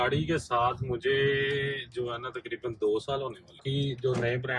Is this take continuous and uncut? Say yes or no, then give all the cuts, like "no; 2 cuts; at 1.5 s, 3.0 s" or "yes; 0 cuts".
no; 1 cut; at 3.6 s